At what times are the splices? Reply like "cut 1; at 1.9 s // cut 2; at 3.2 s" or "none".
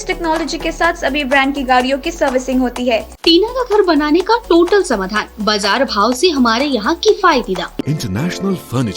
cut 1; at 3.1 s // cut 2; at 7.8 s